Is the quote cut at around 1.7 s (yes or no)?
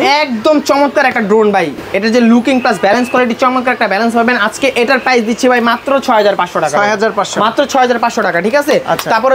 no